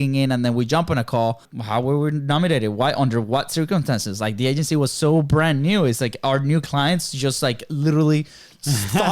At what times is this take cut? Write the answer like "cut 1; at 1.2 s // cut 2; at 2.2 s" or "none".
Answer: cut 1; at 1.5 s